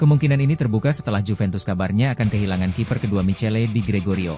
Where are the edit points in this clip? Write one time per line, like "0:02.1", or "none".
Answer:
none